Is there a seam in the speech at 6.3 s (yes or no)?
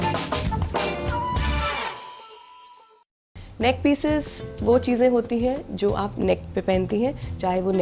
no